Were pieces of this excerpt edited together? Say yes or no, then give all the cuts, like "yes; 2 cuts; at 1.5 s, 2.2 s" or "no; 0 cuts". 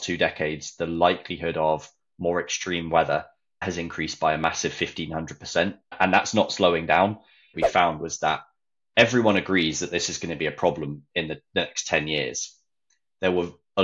yes; 3 cuts; at 3.6 s, 5.9 s, 7.5 s